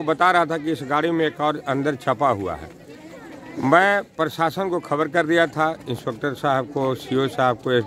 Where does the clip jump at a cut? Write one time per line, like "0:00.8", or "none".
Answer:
none